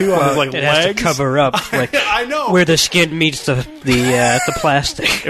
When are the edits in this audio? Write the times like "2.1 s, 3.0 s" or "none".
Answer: none